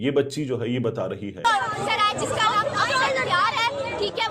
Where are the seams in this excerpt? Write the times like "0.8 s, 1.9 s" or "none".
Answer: 1.3 s